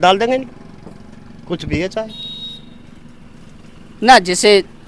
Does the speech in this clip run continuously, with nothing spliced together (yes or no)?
yes